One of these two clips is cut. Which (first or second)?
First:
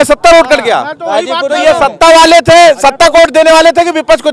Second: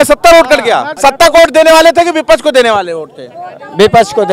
second